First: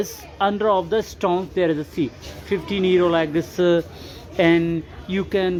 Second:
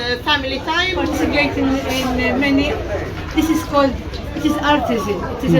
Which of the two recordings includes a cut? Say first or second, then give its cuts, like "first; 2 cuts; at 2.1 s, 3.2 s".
second; 1 cut; at 1.2 s